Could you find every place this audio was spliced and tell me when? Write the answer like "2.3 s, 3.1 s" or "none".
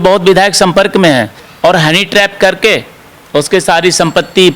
1.4 s

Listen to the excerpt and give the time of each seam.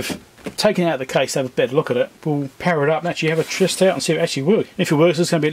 2.2 s, 4.7 s

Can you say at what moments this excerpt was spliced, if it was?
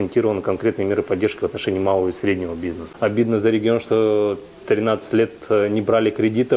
2.9 s

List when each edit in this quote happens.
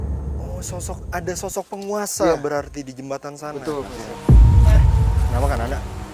4.0 s

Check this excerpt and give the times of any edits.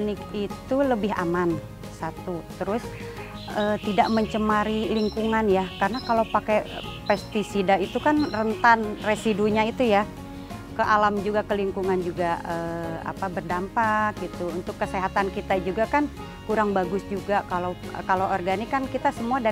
none

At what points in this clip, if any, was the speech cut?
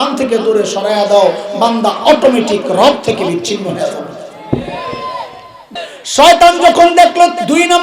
5.6 s

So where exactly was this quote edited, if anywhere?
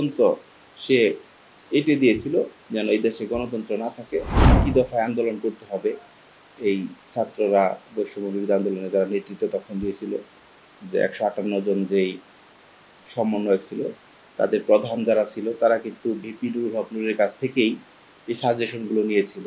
4.4 s

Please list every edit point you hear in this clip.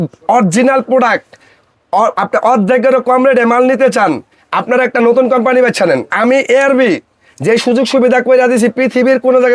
6.1 s

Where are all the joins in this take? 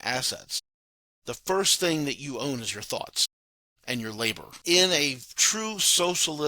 4.5 s

